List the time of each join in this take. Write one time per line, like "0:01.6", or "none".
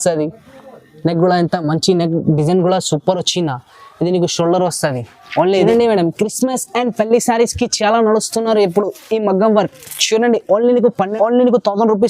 0:05.6
0:11.1